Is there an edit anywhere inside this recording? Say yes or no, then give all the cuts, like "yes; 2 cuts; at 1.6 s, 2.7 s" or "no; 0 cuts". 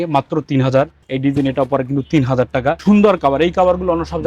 yes; 2 cuts; at 1.0 s, 2.8 s